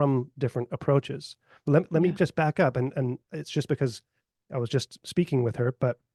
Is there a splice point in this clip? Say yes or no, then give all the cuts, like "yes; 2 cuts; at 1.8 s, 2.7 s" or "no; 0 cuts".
no; 0 cuts